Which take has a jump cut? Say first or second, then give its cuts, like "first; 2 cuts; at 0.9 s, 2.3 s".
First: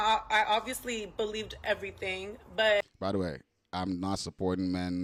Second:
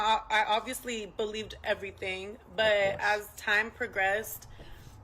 second; 1 cut; at 2.8 s